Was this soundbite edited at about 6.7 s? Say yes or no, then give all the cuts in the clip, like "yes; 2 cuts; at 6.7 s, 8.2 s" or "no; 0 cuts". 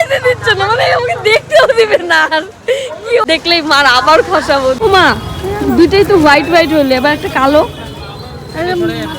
no; 2 cuts; at 3.2 s, 4.8 s